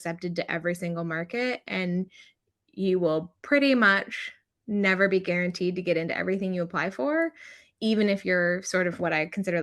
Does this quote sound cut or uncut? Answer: uncut